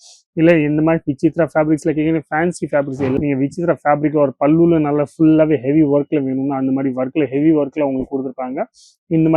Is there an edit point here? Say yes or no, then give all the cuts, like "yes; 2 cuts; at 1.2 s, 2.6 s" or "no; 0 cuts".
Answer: yes; 1 cut; at 3.2 s